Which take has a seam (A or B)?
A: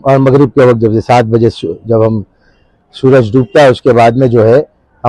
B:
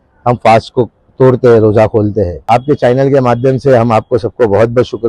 B